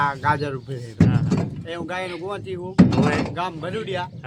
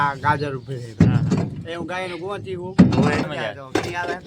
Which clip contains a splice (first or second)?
second